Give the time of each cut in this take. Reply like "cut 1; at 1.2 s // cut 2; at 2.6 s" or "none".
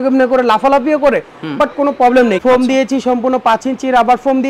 cut 1; at 2.4 s